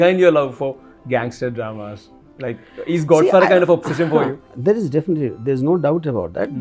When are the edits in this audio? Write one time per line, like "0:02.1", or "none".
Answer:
0:04.5